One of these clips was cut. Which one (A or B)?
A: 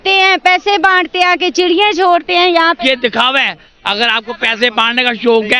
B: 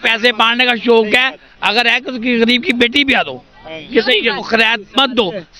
B